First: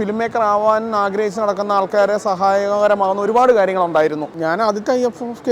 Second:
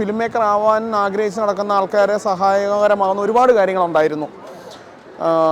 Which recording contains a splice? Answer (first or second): first